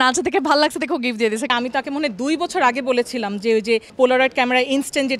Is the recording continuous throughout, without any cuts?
no; 2 cuts; at 1.5 s, 3.9 s

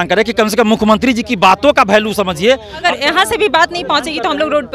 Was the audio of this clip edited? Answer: yes; 1 cut; at 2.8 s

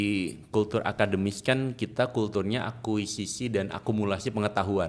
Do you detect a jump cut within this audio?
no; 0 cuts

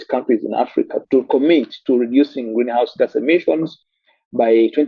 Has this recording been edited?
yes; 1 cut; at 1.0 s

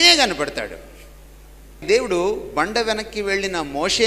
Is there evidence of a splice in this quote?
yes; 1 cut; at 1.9 s

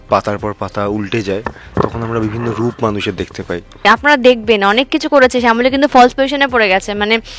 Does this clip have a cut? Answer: yes; 1 cut; at 3.8 s

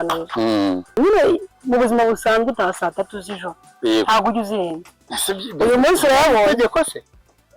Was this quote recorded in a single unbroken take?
no; 1 cut; at 0.9 s

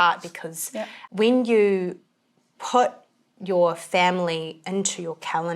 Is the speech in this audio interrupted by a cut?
yes; 1 cut; at 1.0 s

